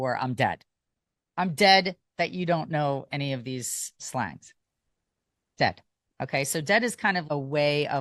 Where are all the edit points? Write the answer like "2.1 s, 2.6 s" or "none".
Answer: none